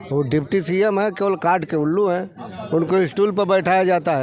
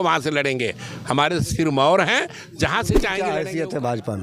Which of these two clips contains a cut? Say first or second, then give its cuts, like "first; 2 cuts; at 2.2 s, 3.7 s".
second; 1 cut; at 3.2 s